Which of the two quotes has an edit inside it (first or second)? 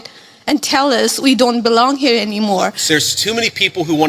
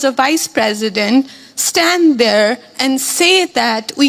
first